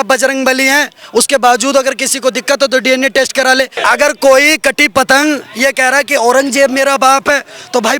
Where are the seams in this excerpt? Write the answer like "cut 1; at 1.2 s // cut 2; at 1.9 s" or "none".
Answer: cut 1; at 3.8 s